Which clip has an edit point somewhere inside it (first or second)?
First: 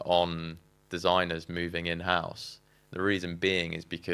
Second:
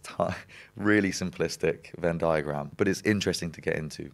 second